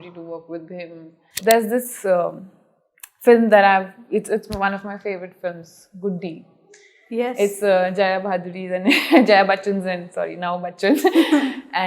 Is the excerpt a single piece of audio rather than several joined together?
no; 1 cut; at 1.3 s

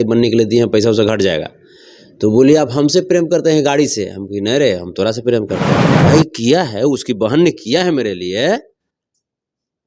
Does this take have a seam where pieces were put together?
yes; 1 cut; at 6.0 s

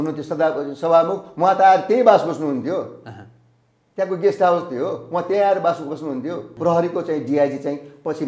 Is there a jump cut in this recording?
yes; 1 cut; at 6.5 s

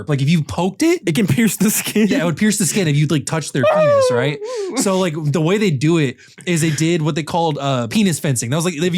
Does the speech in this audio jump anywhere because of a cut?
yes; 2 cuts; at 1.0 s, 7.9 s

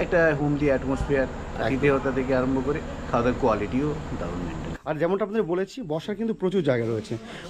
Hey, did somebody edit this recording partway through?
yes; 1 cut; at 4.7 s

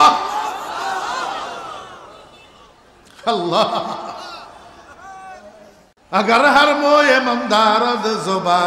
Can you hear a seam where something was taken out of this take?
yes; 1 cut; at 5.9 s

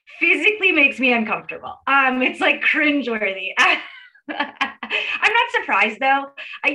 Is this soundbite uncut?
yes; 0 cuts

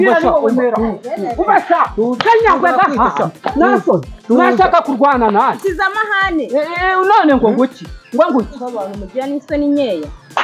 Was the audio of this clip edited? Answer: no; 0 cuts

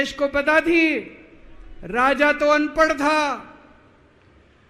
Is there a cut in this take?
no; 0 cuts

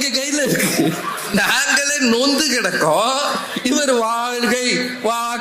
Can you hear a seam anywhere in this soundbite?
yes; 1 cut; at 1.3 s

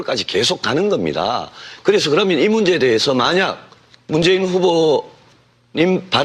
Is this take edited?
yes; 1 cut; at 3.1 s

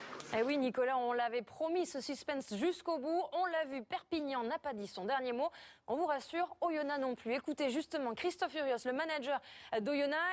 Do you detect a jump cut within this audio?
yes; 1 cut; at 4.8 s

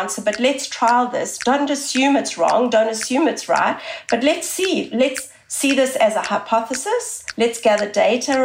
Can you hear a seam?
yes; 1 cut; at 7.2 s

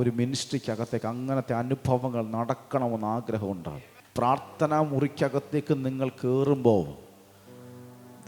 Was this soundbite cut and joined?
yes; 1 cut; at 4.0 s

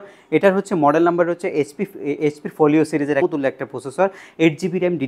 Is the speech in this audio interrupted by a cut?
yes; 1 cut; at 3.2 s

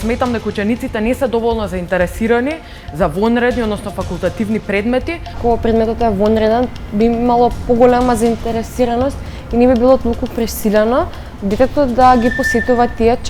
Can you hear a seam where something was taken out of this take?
yes; 1 cut; at 5.3 s

